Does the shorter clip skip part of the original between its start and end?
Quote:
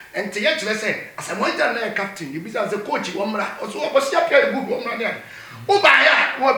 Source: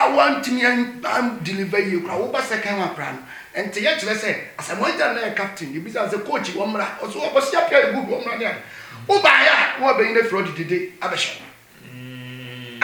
no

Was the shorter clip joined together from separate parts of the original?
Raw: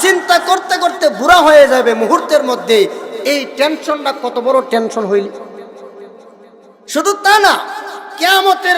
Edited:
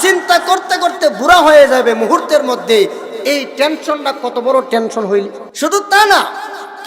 yes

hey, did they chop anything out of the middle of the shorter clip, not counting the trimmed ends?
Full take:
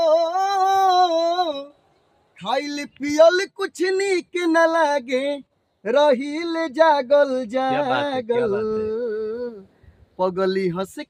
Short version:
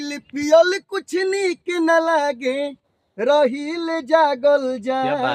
no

